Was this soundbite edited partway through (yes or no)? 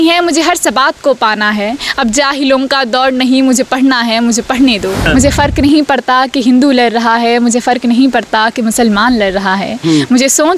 yes